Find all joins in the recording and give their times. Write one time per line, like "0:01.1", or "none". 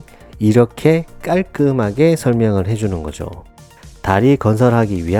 none